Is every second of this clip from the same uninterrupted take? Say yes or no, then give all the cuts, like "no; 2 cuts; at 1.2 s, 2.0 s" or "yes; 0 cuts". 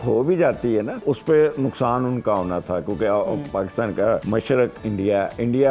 no; 2 cuts; at 1.0 s, 4.2 s